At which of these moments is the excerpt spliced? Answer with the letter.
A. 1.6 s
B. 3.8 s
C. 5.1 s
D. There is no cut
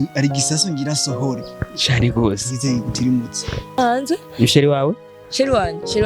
B